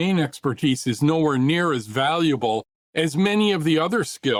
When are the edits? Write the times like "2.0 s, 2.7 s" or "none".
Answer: none